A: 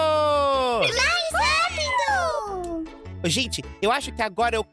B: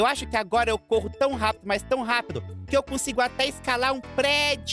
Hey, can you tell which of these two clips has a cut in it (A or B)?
A